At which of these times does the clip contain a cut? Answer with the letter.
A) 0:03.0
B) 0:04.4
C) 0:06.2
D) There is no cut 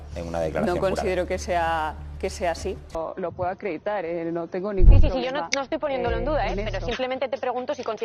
A